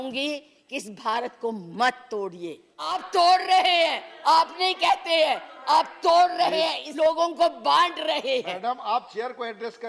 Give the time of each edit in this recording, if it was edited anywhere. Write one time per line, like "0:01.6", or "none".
0:03.0
0:06.8